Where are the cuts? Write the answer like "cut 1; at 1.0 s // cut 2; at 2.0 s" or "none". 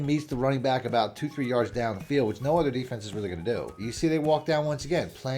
cut 1; at 3.8 s